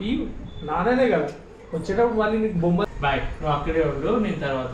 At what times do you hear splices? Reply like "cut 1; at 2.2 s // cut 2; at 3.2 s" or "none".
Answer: cut 1; at 2.9 s

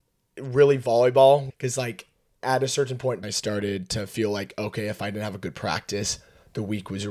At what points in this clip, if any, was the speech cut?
cut 1; at 1.5 s // cut 2; at 3.3 s

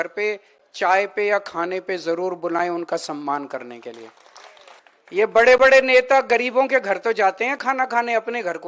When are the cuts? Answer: none

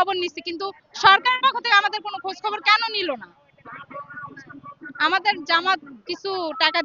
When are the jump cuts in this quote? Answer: none

